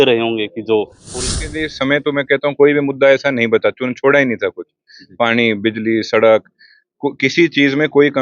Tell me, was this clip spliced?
yes; 1 cut; at 1.2 s

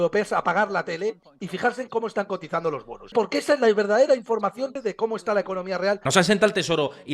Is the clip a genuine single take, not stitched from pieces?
no; 3 cuts; at 3.1 s, 4.7 s, 6.0 s

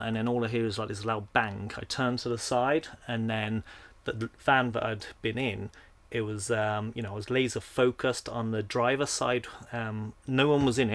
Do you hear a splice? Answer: no; 0 cuts

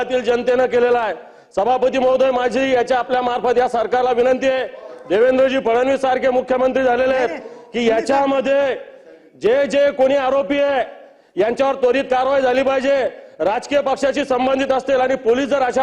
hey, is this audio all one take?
yes; 0 cuts

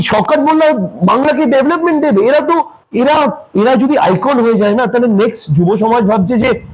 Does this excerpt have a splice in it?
no; 0 cuts

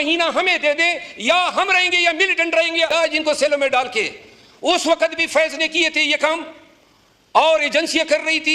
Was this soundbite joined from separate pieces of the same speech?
yes; 1 cut; at 2.9 s

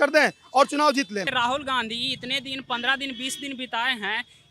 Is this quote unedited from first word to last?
no; 1 cut; at 1.3 s

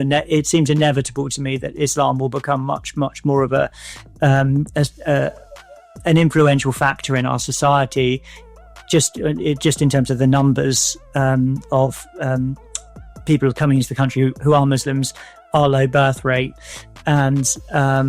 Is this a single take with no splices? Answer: yes; 0 cuts

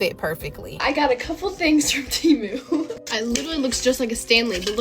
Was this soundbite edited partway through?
yes; 2 cuts; at 0.8 s, 2.9 s

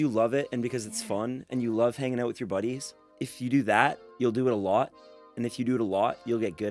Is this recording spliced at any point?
yes; 2 cuts; at 3.2 s, 4.1 s

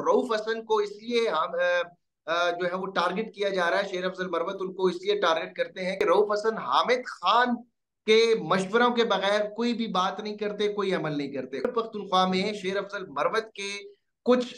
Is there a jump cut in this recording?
yes; 2 cuts; at 6.0 s, 11.7 s

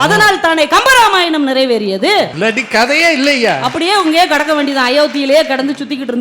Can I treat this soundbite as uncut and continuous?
no; 1 cut; at 2.3 s

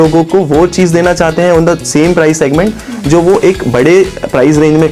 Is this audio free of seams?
yes; 0 cuts

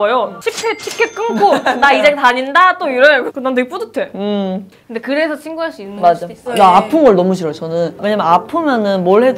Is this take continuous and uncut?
no; 2 cuts; at 6.6 s, 8.0 s

